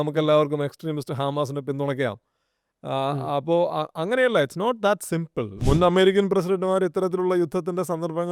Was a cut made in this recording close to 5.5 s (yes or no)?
yes